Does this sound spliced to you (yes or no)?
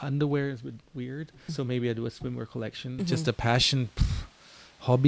yes